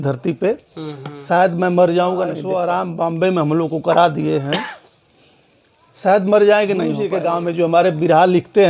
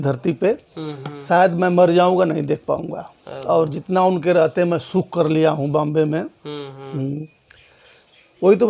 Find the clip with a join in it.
first; 2 cuts; at 2.4 s, 7.1 s

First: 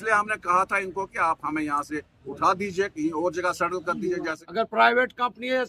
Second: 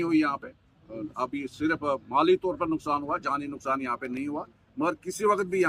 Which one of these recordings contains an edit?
first; 1 cut; at 4.4 s

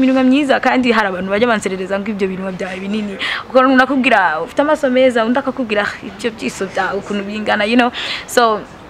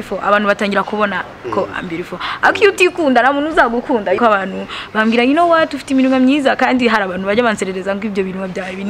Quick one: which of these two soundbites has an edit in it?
second; 1 cut; at 4.2 s

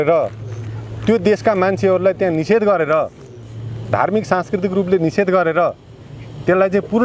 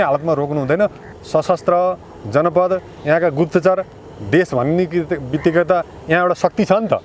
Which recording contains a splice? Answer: second; 1 cut; at 1.0 s

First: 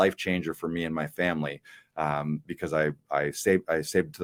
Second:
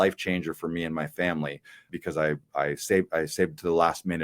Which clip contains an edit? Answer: second; 1 cut; at 1.9 s

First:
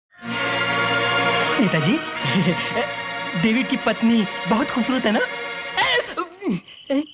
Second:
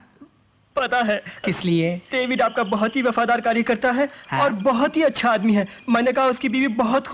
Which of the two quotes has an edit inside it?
first; 1 cut; at 1.5 s

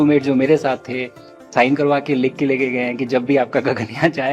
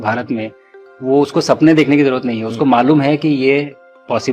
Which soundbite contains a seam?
first; 1 cut; at 1.5 s

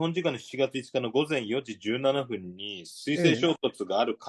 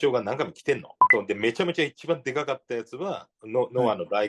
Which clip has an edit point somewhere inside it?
second; 1 cut; at 0.9 s

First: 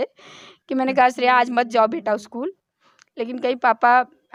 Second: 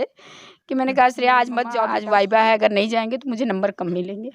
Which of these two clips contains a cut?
second; 1 cut; at 2.0 s

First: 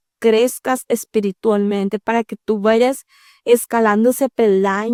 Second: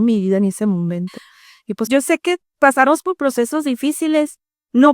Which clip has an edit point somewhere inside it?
second; 1 cut; at 1.9 s

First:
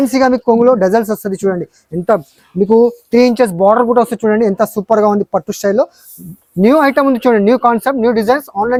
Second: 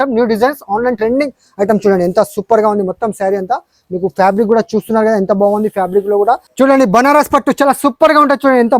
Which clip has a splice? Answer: second; 1 cut; at 6.5 s

